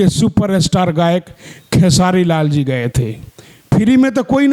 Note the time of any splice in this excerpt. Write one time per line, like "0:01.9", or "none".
none